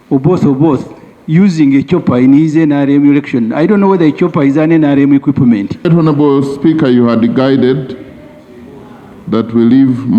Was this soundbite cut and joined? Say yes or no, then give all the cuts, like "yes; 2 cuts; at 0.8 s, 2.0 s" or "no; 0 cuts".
yes; 1 cut; at 5.7 s